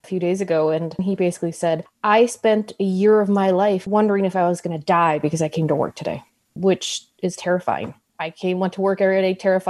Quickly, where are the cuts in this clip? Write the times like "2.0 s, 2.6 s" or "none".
1.0 s, 3.8 s, 8.0 s